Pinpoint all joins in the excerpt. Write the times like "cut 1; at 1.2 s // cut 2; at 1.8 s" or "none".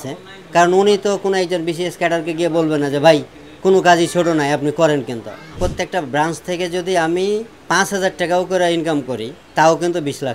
cut 1; at 5.6 s // cut 2; at 7.5 s // cut 3; at 9.3 s